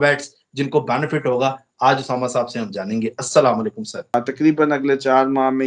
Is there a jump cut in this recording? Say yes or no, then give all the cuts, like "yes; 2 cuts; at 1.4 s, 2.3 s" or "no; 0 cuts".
yes; 1 cut; at 4.1 s